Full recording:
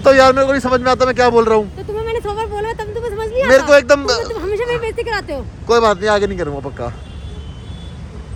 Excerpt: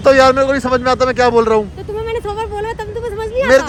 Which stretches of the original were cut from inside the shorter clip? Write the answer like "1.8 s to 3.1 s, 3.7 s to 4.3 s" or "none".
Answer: none